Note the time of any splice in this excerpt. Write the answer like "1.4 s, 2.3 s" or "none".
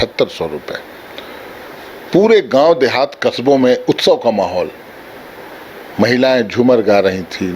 none